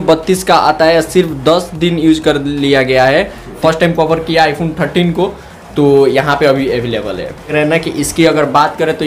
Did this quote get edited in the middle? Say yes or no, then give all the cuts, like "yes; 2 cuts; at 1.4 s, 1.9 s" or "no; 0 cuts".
yes; 2 cuts; at 3.5 s, 7.5 s